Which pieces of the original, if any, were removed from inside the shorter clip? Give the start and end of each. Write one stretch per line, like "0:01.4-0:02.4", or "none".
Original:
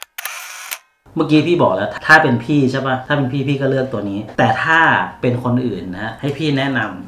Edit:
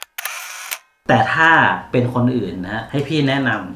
0:01.0-0:04.3